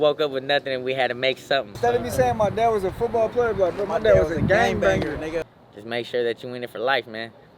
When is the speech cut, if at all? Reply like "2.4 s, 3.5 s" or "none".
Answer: 1.7 s, 5.4 s